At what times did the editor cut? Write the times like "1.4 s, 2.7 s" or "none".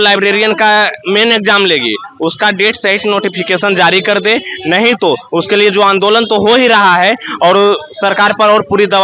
none